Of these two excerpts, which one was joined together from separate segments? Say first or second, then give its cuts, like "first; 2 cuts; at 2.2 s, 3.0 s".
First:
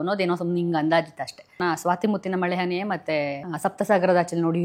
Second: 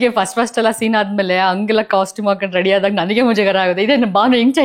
first; 2 cuts; at 1.6 s, 3.4 s